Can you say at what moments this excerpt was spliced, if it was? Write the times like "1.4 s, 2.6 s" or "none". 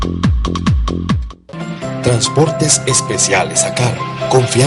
1.2 s